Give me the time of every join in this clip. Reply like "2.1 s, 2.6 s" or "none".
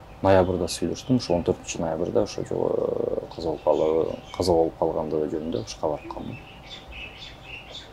none